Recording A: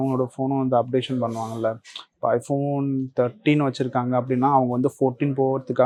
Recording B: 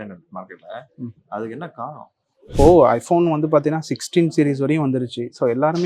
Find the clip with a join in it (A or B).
B